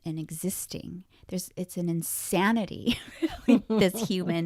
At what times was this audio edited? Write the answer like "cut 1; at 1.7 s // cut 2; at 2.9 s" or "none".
none